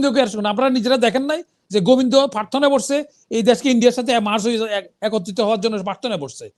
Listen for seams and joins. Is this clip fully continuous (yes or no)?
yes